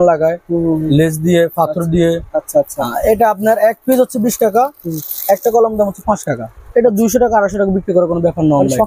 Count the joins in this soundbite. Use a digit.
0